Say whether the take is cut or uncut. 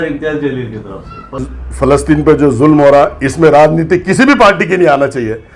cut